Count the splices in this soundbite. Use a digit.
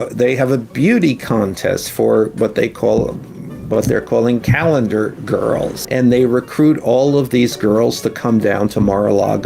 1